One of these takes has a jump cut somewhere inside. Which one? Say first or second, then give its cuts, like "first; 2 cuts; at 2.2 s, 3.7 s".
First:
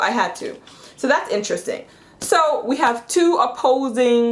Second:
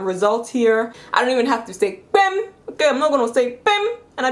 second; 1 cut; at 1.0 s